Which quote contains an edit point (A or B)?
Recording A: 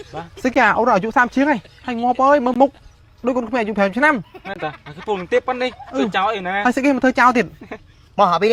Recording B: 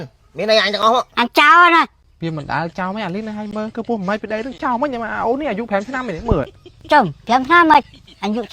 B